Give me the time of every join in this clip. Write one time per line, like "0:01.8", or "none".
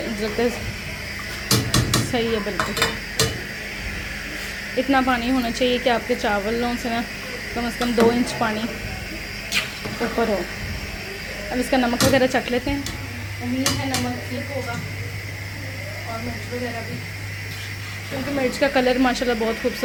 none